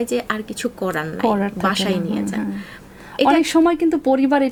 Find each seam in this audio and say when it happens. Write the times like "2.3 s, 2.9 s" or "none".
none